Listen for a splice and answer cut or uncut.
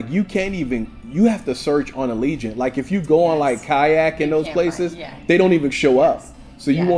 uncut